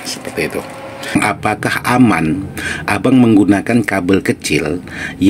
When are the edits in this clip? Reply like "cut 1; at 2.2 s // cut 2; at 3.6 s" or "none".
cut 1; at 1.2 s